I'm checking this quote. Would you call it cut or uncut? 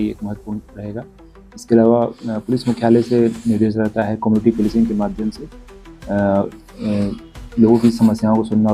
uncut